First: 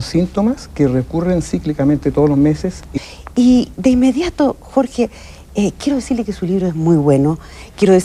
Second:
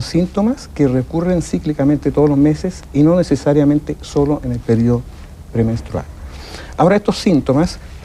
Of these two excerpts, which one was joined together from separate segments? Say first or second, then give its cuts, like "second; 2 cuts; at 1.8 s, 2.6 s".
second; 1 cut; at 2.9 s